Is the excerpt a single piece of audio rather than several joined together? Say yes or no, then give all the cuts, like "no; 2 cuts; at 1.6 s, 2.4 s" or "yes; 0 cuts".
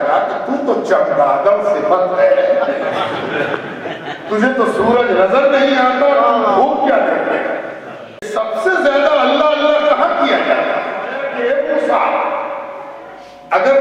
no; 2 cuts; at 8.2 s, 11.2 s